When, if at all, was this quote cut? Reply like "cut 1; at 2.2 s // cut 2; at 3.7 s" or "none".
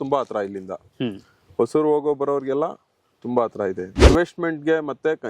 cut 1; at 4.1 s